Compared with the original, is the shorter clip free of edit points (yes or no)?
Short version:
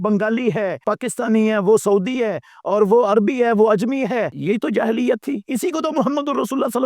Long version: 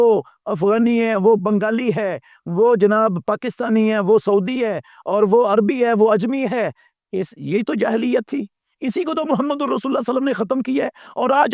no